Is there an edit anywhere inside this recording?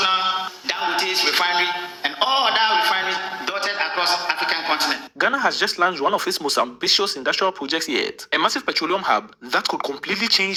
no; 0 cuts

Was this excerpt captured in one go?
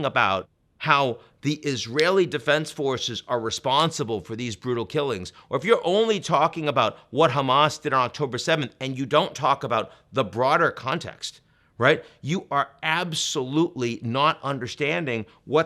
yes; 0 cuts

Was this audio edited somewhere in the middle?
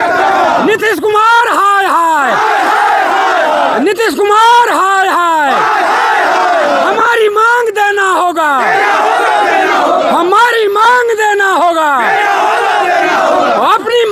no; 0 cuts

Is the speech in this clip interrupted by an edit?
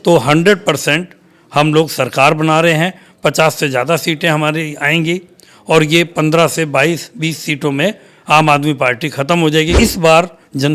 yes; 1 cut; at 9.7 s

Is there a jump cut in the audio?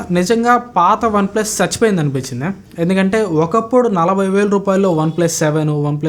no; 0 cuts

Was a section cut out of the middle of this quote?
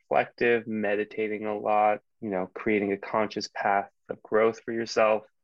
yes; 1 cut; at 2.1 s

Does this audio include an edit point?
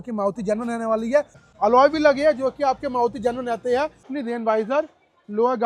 yes; 2 cuts; at 1.4 s, 4.1 s

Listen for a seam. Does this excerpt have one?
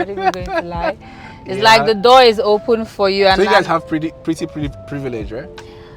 no; 0 cuts

